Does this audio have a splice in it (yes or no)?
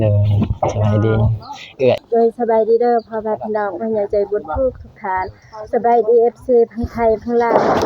yes